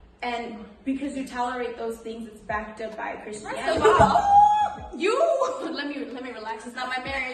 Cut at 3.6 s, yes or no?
yes